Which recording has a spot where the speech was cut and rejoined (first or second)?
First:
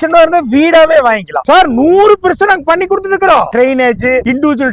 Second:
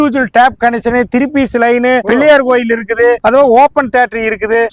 first